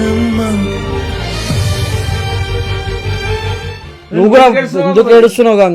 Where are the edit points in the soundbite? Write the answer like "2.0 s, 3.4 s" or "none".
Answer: 3.9 s